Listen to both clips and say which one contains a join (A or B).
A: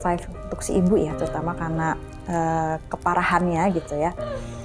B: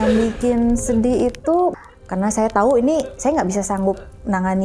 B